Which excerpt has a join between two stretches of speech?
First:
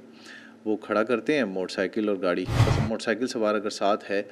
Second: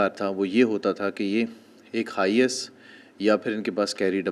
first; 1 cut; at 2.7 s

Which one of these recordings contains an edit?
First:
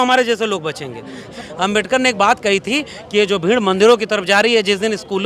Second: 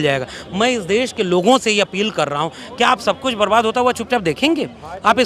first; 1 cut; at 1.2 s

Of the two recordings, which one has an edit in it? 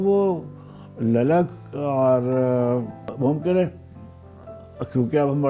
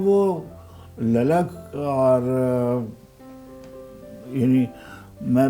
first; 1 cut; at 3.1 s

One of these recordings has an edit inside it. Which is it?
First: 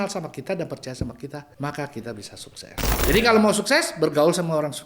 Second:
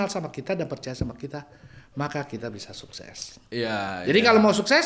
first; 2 cuts; at 1.5 s, 3.0 s

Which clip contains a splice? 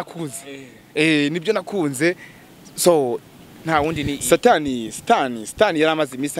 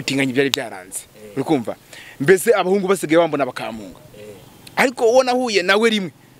first; 1 cut; at 4.1 s

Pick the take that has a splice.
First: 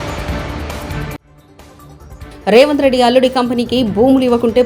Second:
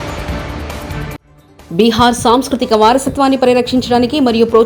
second; 1 cut; at 1.1 s

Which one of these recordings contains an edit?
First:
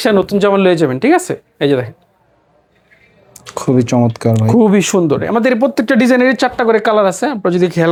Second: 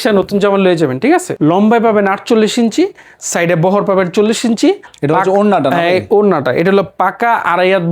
second; 2 cuts; at 1.3 s, 4.9 s

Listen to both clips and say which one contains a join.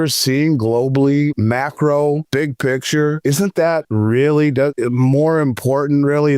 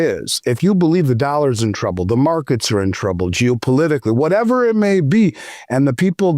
first; 4 cuts; at 1.4 s, 2.2 s, 3.5 s, 4.8 s

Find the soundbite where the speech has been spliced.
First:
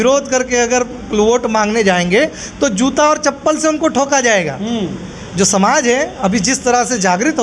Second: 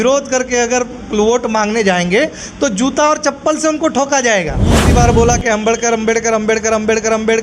second; 1 cut; at 4.9 s

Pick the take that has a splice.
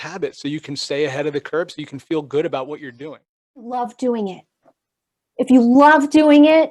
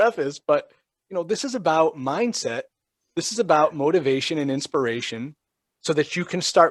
first; 1 cut; at 3.7 s

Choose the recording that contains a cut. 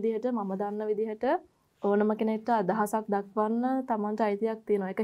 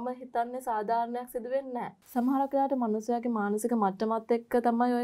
second; 1 cut; at 2.0 s

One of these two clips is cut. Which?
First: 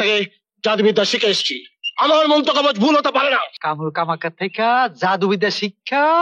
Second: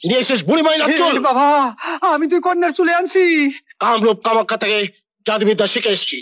first; 1 cut; at 3.5 s

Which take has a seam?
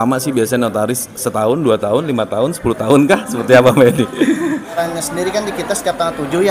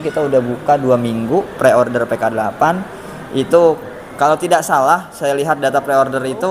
first; 1 cut; at 4.8 s

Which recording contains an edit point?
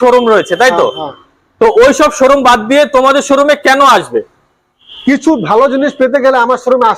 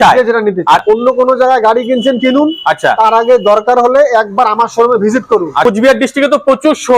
second; 2 cuts; at 0.8 s, 5.6 s

